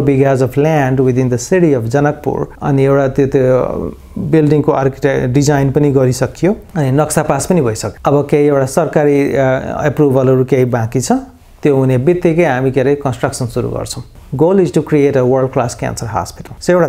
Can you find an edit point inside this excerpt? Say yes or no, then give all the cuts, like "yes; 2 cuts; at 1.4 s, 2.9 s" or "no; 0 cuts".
no; 0 cuts